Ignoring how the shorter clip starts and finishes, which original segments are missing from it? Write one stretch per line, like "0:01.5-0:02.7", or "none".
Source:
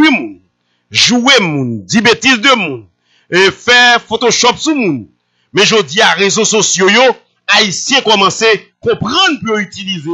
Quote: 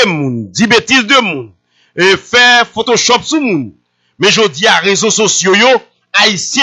none

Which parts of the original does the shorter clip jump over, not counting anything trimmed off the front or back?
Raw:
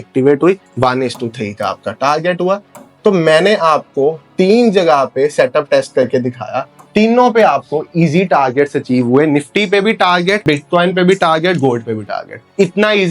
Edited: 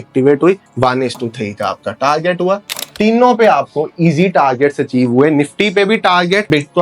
0:02.8-0:06.7

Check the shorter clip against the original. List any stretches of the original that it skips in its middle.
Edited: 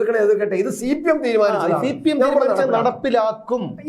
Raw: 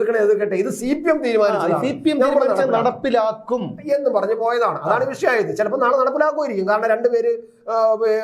none

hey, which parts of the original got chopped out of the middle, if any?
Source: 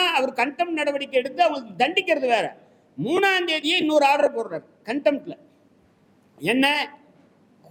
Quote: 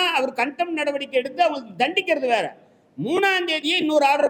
none

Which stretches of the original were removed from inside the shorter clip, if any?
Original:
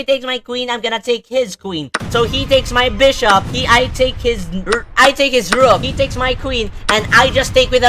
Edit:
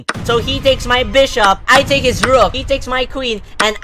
0:03.5-0:04.9

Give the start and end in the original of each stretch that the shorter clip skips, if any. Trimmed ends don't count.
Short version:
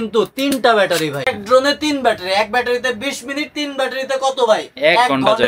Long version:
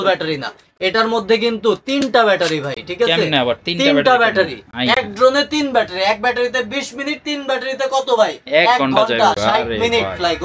0:02.8-0:05.0

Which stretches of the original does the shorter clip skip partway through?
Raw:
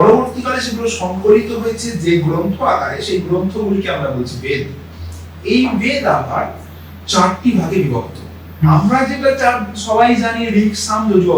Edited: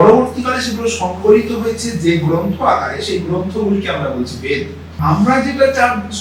0:05.1-0:08.7

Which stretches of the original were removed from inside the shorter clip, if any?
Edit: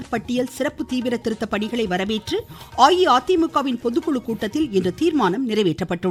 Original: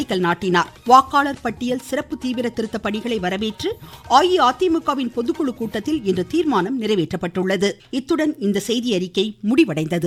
none

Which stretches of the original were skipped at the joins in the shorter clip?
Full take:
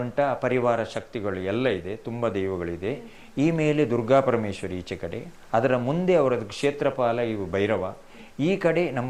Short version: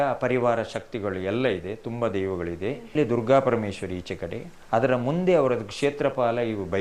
0:03.2-0:03.8

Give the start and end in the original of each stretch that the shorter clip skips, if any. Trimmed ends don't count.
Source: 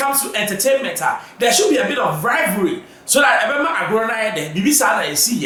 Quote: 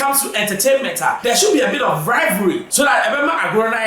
0:01.2-0:01.3
0:02.8-0:03.0

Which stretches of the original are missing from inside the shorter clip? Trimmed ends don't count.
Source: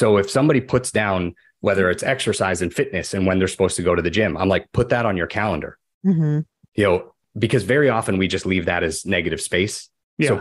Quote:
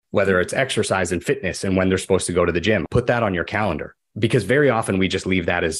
0:04.4-0:04.7
0:05.8-0:07.2

